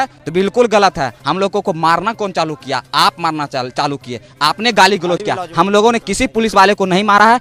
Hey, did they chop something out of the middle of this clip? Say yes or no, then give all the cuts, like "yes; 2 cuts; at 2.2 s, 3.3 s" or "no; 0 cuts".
no; 0 cuts